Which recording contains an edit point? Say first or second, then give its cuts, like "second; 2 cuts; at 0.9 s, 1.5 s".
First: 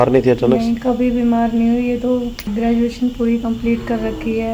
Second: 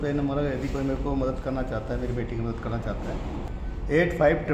first; 1 cut; at 2.5 s